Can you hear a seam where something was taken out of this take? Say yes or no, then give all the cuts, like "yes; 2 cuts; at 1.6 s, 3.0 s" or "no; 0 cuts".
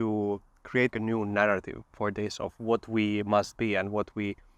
yes; 1 cut; at 0.9 s